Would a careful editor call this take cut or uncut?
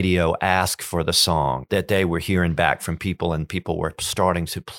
cut